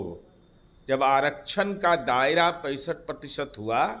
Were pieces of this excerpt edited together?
no; 0 cuts

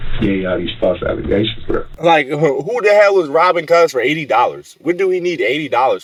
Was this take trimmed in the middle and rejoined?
no; 0 cuts

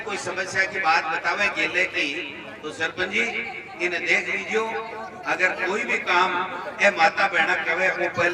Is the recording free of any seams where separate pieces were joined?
yes; 0 cuts

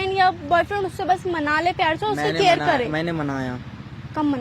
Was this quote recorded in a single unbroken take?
yes; 0 cuts

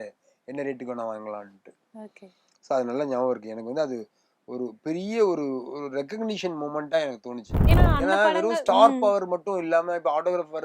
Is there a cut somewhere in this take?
yes; 1 cut; at 7.5 s

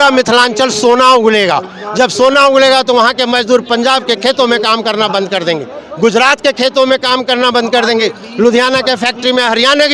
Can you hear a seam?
no; 0 cuts

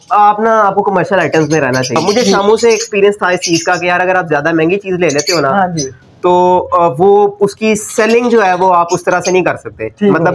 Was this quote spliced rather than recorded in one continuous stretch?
yes; 1 cut; at 2.0 s

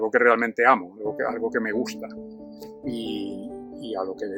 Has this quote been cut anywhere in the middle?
no; 0 cuts

